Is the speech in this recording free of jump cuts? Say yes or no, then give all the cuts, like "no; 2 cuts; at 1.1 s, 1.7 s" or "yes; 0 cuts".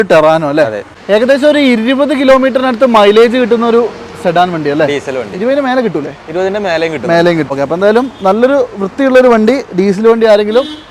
no; 2 cuts; at 0.9 s, 7.5 s